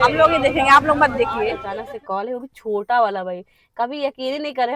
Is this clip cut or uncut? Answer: cut